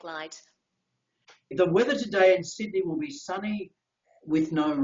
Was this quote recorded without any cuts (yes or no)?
no